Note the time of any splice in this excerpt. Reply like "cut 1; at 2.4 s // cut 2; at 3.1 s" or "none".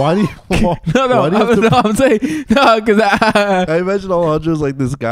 cut 1; at 3.7 s